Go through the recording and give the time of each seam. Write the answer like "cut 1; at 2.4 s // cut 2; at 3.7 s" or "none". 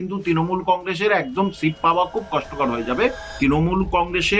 cut 1; at 3.3 s